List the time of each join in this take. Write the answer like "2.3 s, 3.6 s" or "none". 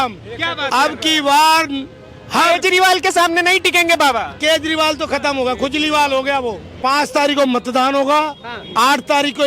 6.7 s